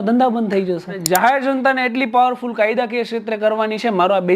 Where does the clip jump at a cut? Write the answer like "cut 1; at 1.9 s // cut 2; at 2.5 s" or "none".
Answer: cut 1; at 1.0 s